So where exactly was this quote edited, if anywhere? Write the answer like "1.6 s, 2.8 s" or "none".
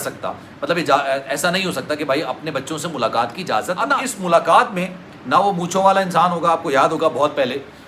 4.0 s